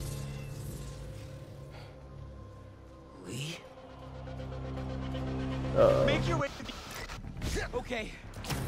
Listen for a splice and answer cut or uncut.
cut